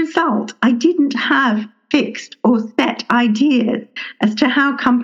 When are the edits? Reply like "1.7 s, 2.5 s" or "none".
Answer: none